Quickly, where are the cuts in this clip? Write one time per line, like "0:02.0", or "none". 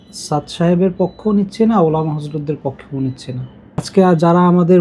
0:03.8